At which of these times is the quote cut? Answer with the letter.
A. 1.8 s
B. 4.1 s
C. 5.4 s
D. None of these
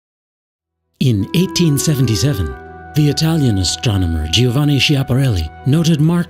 B